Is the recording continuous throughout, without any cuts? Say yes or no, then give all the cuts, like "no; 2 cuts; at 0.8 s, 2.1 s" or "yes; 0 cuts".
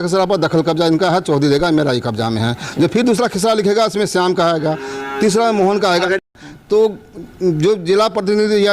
no; 1 cut; at 6.2 s